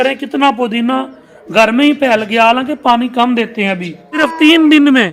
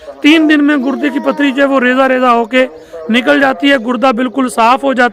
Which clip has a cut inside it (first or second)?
first